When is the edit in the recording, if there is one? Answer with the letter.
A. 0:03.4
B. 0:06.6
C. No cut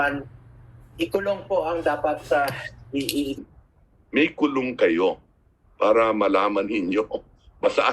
A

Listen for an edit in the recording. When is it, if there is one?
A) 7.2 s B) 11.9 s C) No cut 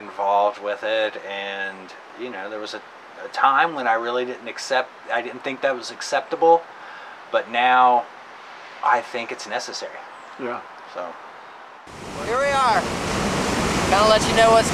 B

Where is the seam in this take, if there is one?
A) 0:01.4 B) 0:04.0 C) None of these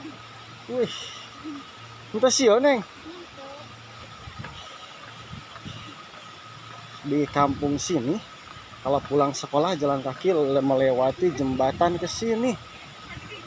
B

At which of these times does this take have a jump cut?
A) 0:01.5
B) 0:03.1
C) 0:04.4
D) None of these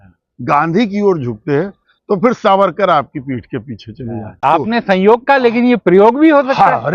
C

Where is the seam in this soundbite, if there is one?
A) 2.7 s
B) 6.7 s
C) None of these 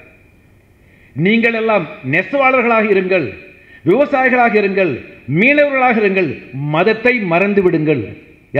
C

